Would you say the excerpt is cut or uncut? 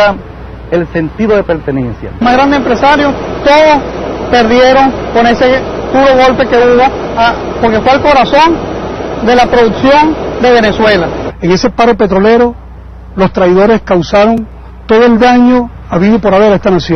uncut